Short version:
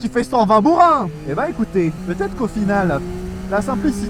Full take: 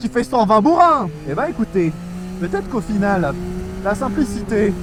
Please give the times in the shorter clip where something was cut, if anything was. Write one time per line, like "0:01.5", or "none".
0:02.0